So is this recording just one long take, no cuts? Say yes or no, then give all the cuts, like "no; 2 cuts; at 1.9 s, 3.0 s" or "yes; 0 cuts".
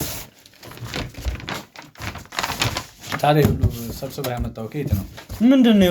yes; 0 cuts